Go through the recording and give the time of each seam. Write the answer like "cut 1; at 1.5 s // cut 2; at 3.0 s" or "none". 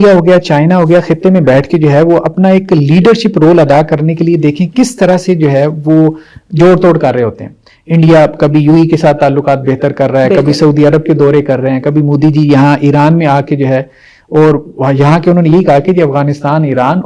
none